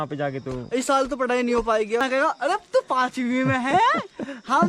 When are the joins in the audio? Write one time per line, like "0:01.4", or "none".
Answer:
0:02.0